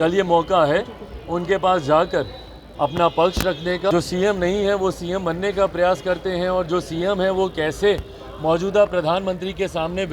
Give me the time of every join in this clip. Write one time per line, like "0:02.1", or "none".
0:03.9